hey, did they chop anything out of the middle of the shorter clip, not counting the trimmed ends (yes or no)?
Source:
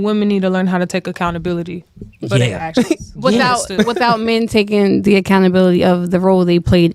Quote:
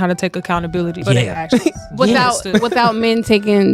yes